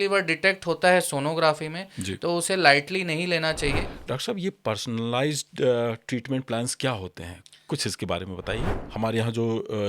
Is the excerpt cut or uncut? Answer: cut